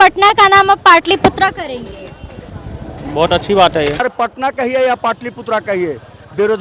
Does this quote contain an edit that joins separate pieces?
yes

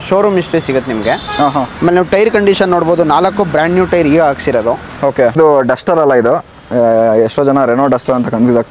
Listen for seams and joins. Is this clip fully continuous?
no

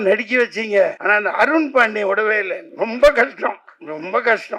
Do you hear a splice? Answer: yes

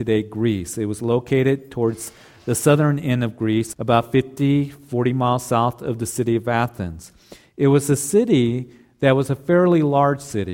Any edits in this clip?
yes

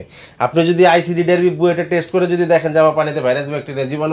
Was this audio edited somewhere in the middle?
no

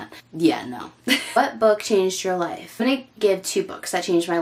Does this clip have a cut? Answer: no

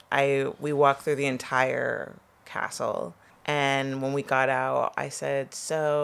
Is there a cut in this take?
yes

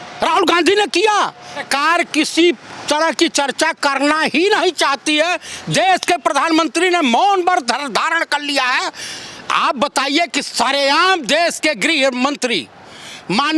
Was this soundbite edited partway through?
no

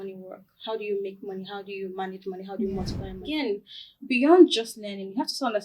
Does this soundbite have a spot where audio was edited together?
yes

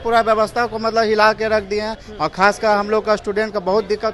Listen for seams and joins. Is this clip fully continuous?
yes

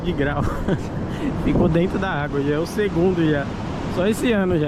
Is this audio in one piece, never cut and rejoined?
yes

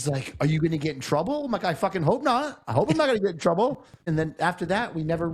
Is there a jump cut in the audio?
yes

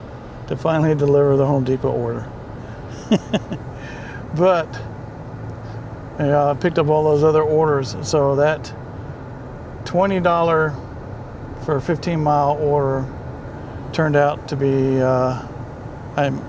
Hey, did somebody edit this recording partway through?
no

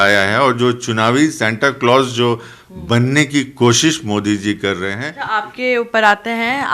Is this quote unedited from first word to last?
no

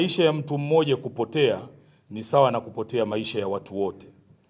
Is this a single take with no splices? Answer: yes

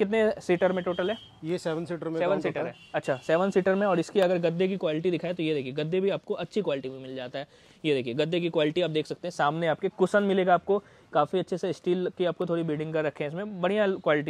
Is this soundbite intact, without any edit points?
yes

